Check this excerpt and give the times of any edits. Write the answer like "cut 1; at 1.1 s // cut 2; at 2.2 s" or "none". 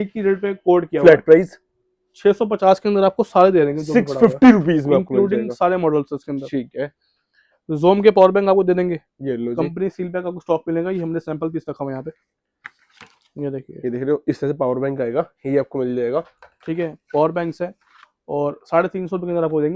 none